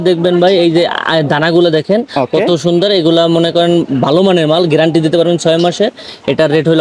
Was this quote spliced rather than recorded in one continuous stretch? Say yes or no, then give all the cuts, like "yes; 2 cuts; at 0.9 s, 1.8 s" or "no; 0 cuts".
no; 0 cuts